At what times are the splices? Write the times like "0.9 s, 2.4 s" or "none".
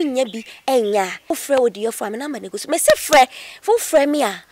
1.3 s